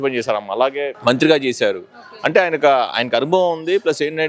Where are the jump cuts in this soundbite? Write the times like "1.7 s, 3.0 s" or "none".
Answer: 0.9 s